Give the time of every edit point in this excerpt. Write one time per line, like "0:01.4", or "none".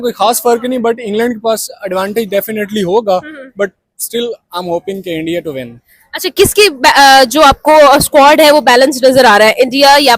none